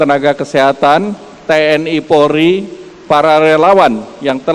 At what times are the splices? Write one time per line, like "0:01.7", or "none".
none